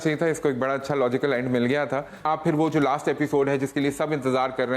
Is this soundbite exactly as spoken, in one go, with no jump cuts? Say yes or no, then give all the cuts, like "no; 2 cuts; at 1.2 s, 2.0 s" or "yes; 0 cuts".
no; 1 cut; at 2.2 s